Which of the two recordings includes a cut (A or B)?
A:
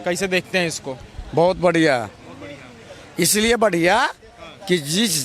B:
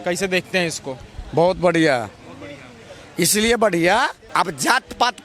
B